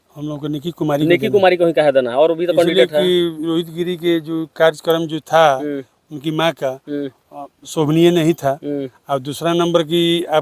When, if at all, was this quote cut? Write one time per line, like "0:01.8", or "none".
none